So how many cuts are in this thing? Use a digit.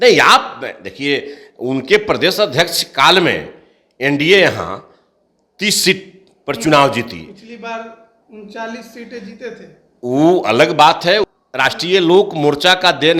1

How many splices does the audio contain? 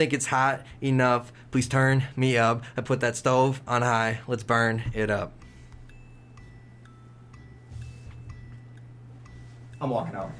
0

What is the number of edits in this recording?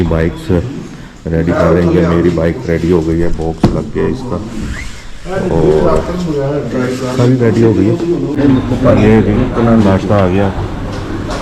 1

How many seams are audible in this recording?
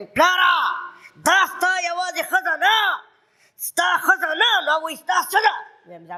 0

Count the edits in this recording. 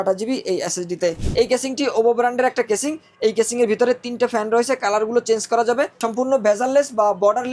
2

